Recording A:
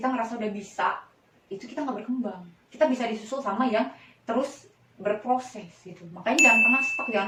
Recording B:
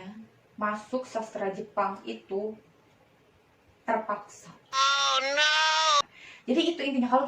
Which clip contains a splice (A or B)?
B